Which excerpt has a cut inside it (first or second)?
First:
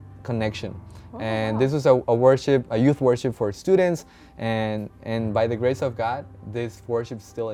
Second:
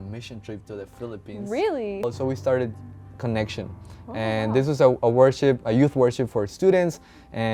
second